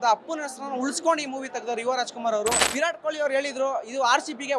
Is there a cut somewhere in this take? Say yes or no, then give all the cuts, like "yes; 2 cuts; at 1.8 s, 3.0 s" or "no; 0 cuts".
yes; 1 cut; at 2.7 s